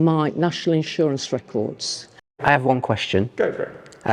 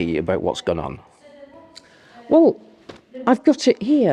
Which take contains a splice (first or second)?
first